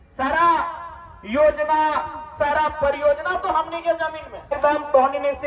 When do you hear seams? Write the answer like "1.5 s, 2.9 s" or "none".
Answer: 4.5 s